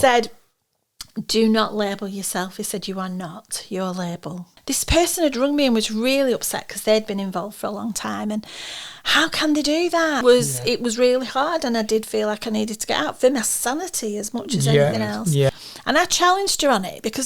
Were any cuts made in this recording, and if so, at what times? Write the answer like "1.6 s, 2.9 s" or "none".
4.5 s, 10.2 s, 15.5 s